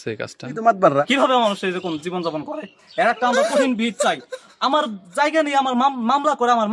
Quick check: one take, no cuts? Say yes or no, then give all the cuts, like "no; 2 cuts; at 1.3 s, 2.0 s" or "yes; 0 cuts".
no; 1 cut; at 1.1 s